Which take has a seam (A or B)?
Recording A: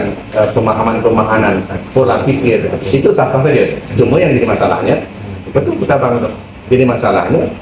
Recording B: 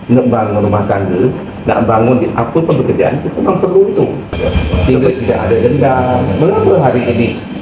B